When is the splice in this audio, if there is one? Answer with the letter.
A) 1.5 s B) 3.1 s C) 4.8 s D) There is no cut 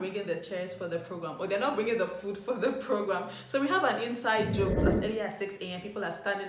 C